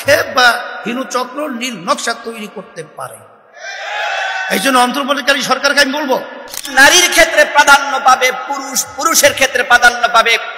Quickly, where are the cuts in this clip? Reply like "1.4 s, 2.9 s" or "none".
6.6 s